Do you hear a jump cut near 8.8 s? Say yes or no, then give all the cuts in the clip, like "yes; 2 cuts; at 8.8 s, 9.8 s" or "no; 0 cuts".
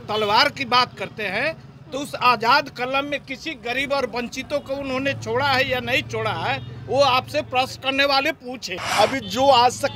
yes; 1 cut; at 8.8 s